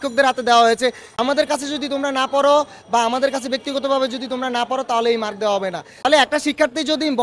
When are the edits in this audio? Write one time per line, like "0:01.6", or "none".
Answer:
0:01.1
0:05.9